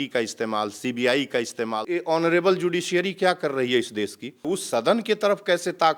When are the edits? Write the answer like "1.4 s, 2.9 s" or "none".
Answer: 1.9 s, 4.5 s